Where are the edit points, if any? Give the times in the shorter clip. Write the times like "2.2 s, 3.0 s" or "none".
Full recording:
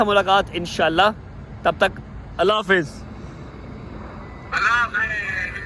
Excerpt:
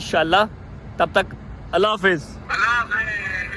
2.4 s